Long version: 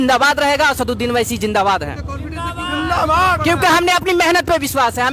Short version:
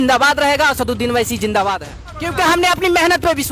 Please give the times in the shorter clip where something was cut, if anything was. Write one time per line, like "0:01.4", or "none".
0:02.2